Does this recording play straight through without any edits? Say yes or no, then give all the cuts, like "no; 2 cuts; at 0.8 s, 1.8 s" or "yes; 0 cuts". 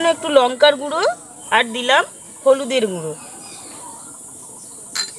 no; 1 cut; at 1.3 s